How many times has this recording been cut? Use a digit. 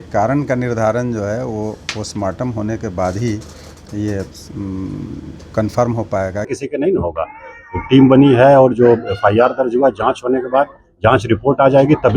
1